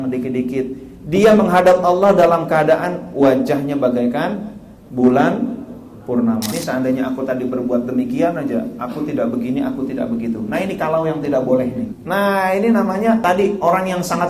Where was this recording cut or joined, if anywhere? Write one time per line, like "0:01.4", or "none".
0:06.5
0:12.0
0:13.2